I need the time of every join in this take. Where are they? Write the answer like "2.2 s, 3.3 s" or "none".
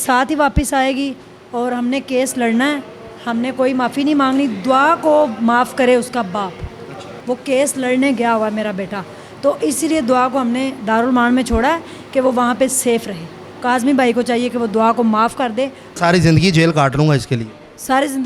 7.2 s, 13.4 s, 15.9 s